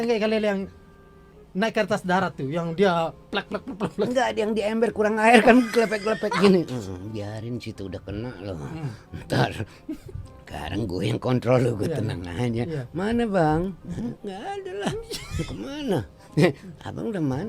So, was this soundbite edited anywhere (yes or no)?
no